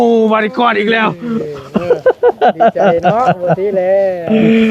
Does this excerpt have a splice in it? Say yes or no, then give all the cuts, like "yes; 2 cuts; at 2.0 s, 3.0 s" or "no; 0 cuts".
no; 0 cuts